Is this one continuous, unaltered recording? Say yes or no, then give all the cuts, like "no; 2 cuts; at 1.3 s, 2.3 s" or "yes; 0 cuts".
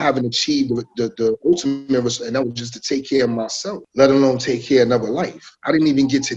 yes; 0 cuts